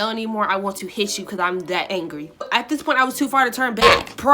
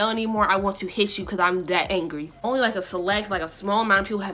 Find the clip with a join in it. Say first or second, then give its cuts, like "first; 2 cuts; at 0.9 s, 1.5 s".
first; 1 cut; at 2.4 s